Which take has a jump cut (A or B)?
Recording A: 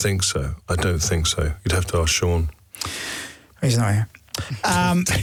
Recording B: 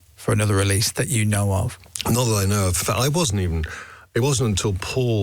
B